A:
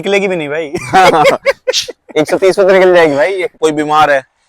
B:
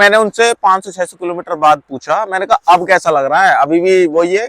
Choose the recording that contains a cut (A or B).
A